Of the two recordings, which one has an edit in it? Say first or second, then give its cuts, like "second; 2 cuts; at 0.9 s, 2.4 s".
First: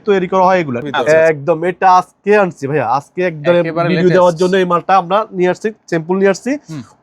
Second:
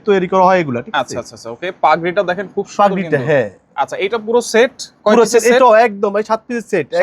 first; 1 cut; at 1.0 s